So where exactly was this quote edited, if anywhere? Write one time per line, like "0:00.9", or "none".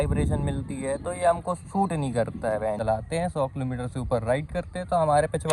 0:02.8